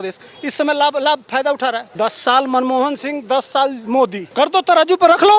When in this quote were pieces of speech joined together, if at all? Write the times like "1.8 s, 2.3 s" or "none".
1.9 s, 4.2 s